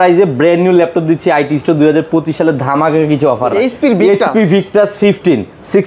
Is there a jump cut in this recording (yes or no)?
yes